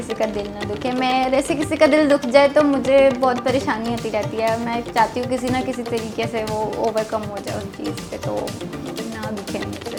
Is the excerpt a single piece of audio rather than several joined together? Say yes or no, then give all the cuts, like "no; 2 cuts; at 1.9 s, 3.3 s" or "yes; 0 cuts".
yes; 0 cuts